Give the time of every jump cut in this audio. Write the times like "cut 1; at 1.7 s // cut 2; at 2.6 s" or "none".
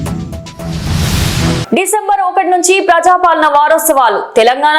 cut 1; at 1.6 s